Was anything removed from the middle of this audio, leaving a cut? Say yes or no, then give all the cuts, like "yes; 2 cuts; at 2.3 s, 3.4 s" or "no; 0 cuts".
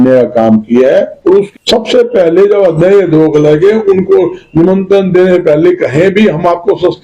yes; 1 cut; at 1.5 s